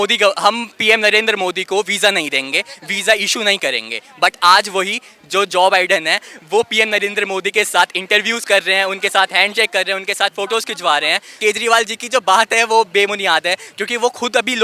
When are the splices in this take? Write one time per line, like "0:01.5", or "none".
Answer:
0:11.4

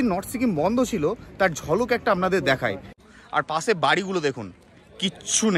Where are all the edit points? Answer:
0:03.0

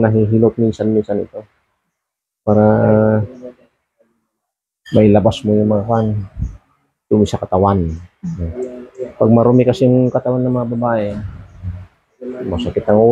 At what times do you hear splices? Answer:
none

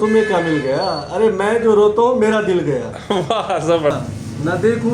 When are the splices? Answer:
0:03.9

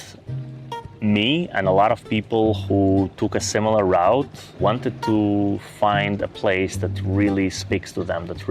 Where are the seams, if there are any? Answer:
0:04.5

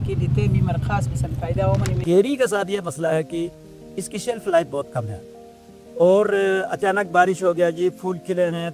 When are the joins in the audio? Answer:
0:02.0

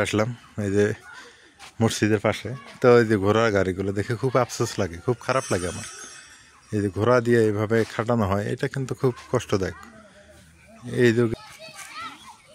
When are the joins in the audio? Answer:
0:11.3

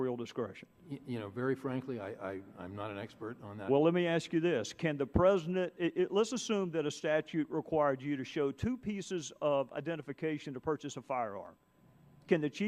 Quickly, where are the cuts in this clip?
none

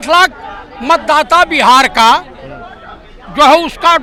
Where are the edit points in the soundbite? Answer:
none

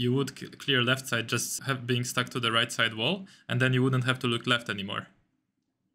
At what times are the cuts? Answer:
0:01.5

